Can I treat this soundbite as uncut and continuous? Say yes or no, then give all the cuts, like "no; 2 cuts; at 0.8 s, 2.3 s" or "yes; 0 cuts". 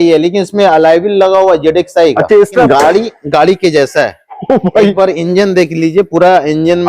no; 1 cut; at 2.7 s